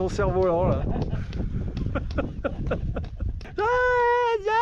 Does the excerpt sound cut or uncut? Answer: cut